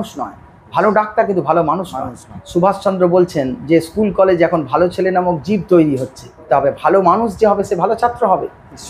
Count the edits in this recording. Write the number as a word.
two